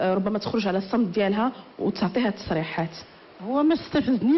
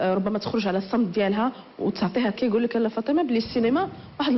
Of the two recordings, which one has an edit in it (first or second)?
first